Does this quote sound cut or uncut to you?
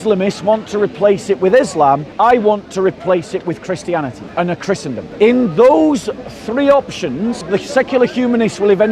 cut